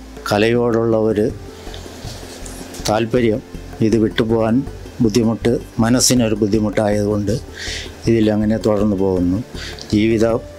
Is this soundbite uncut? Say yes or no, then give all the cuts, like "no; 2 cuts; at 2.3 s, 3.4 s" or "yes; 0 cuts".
yes; 0 cuts